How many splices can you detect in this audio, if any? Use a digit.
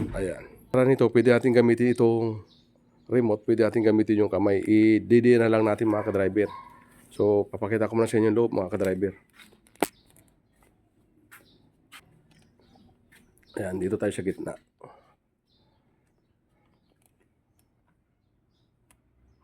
2